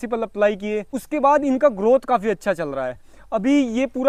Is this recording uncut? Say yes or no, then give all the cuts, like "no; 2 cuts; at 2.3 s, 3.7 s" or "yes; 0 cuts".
yes; 0 cuts